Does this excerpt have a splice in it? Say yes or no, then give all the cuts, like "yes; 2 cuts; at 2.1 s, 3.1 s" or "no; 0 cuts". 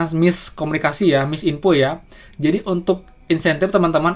no; 0 cuts